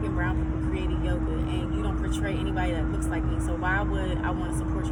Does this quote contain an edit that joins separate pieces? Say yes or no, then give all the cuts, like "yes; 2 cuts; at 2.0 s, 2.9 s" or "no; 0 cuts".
no; 0 cuts